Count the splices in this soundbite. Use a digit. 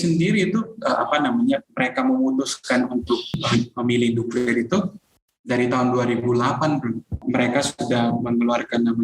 2